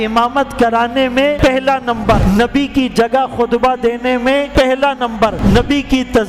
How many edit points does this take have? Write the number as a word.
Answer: four